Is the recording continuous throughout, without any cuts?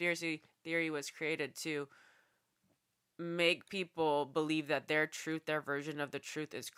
yes; 0 cuts

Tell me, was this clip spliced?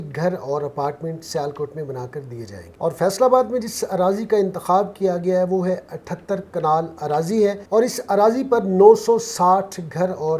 no; 0 cuts

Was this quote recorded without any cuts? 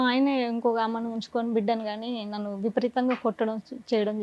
yes; 0 cuts

